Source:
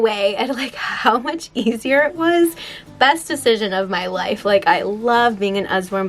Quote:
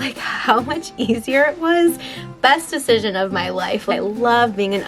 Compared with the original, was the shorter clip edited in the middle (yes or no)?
yes